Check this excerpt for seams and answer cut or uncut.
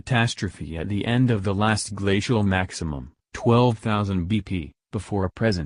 cut